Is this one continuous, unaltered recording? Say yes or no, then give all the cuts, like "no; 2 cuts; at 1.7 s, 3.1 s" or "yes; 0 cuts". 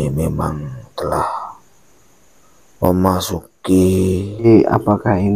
no; 1 cut; at 4.4 s